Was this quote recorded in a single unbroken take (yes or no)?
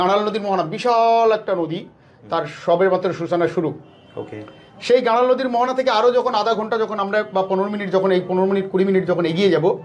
yes